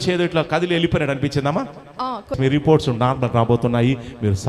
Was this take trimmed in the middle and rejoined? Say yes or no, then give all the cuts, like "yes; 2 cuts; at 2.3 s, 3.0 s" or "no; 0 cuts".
yes; 1 cut; at 2.3 s